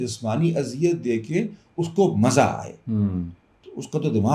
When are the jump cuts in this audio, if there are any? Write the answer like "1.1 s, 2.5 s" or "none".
none